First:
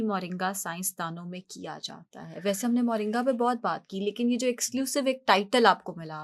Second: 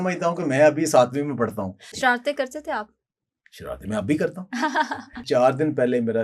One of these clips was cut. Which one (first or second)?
second